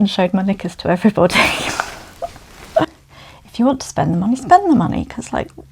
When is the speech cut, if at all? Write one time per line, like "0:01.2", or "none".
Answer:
0:02.9

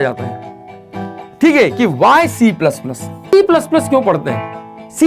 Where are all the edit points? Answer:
0:03.2

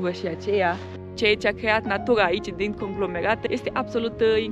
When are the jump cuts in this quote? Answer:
0:01.1
0:03.4

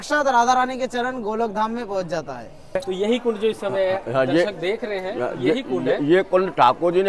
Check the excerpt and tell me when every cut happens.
0:02.8

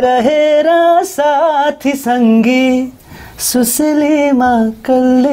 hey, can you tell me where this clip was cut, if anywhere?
none

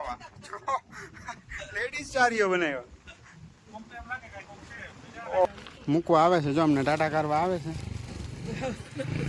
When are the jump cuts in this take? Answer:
0:05.5

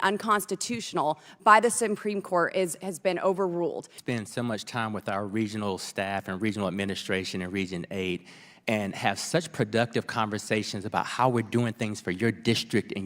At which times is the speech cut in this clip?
0:03.9

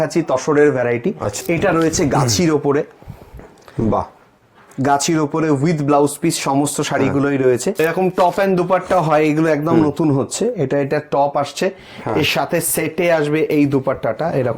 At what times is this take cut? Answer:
0:01.3
0:07.8

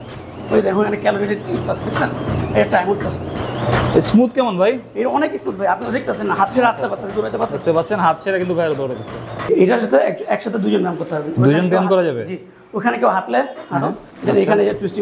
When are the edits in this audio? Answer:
0:03.4
0:09.5
0:14.1

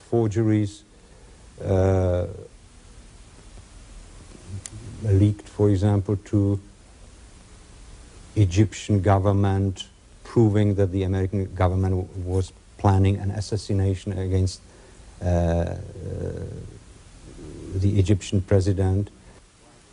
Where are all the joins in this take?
none

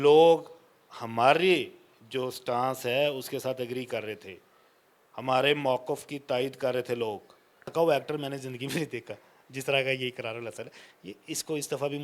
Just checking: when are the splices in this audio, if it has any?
0:07.7

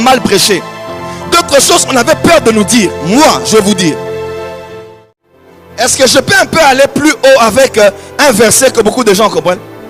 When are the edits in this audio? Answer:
0:04.8

